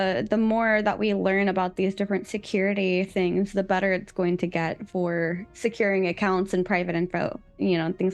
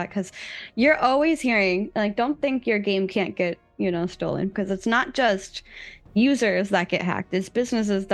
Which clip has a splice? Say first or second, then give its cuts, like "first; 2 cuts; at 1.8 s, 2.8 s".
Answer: second; 1 cut; at 4.5 s